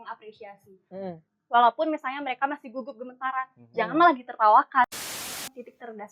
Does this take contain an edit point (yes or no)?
yes